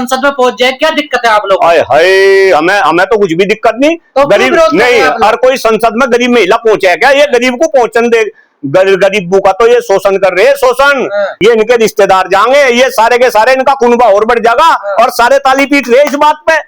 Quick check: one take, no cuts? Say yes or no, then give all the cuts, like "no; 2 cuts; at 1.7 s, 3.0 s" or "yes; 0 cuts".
no; 1 cut; at 11.3 s